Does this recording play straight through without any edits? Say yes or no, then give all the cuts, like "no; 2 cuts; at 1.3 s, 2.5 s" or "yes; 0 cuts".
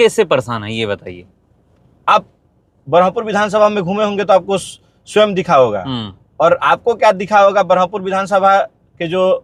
yes; 0 cuts